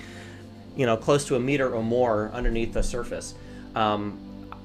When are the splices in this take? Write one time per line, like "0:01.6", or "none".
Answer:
none